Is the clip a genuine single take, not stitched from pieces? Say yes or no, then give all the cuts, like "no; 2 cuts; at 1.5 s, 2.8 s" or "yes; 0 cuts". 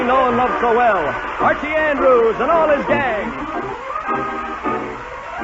no; 1 cut; at 1.1 s